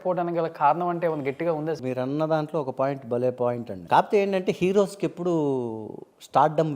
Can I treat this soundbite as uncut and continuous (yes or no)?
no